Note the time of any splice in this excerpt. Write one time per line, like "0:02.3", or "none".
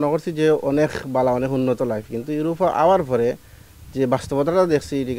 none